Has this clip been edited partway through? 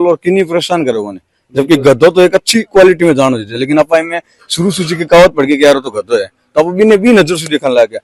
no; 0 cuts

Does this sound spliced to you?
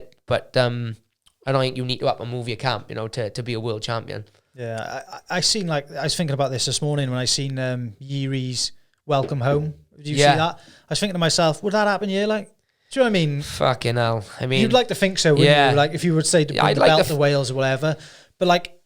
no; 0 cuts

